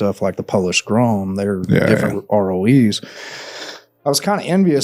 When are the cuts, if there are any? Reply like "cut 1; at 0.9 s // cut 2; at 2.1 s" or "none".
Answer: none